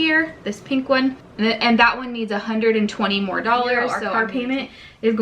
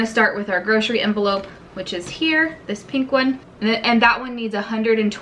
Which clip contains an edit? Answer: first; 1 cut; at 4.0 s

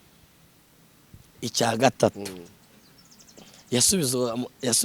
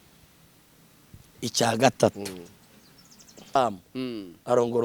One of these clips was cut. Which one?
second; 1 cut; at 3.6 s

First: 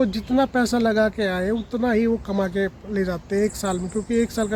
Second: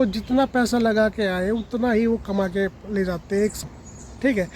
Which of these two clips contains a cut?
second; 1 cut; at 3.6 s

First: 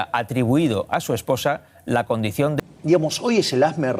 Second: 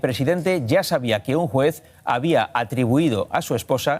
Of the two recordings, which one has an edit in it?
first; 1 cut; at 2.5 s

